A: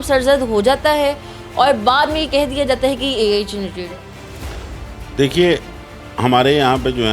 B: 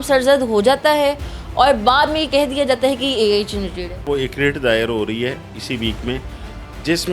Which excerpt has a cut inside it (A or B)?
B